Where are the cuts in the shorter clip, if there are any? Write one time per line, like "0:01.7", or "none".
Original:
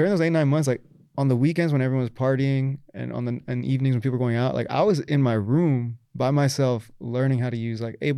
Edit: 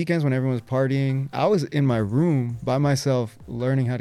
0:01.3
0:02.5